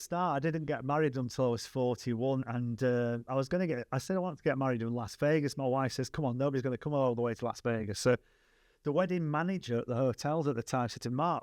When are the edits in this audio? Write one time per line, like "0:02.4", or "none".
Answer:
none